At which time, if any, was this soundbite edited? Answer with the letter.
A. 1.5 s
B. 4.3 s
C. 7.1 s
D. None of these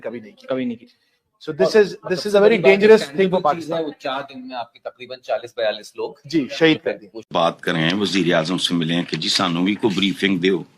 C